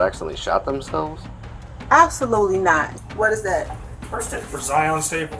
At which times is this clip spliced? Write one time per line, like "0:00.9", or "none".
0:02.9